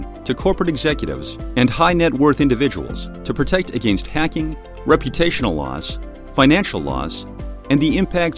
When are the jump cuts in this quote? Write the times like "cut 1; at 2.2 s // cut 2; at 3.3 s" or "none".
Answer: none